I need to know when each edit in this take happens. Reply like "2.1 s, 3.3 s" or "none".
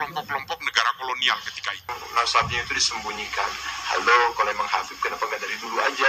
2.0 s

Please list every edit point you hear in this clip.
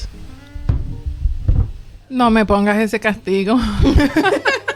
none

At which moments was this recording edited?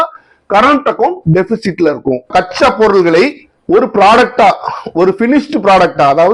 2.3 s

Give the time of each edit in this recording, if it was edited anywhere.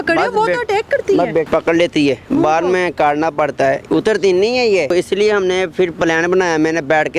1.5 s, 4.9 s

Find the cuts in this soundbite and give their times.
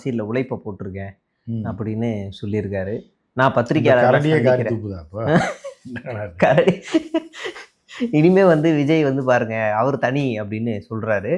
none

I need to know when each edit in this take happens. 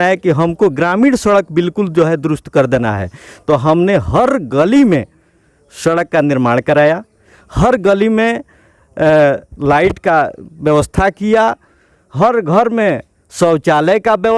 none

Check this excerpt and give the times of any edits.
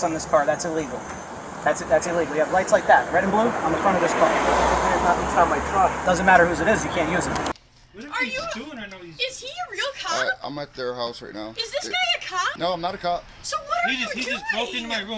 7.5 s, 12.5 s

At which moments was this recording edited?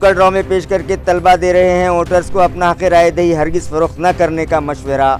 none

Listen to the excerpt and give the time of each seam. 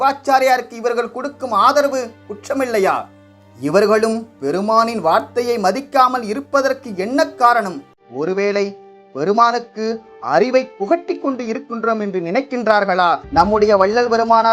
13.2 s

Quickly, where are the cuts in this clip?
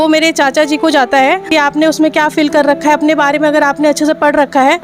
1.4 s

